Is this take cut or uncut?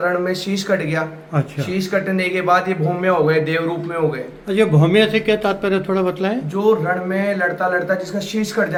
uncut